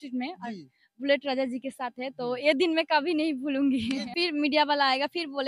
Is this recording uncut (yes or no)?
no